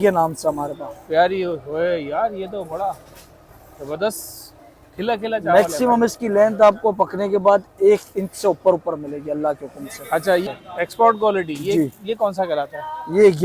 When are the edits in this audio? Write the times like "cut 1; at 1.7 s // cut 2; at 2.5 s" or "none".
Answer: cut 1; at 10.5 s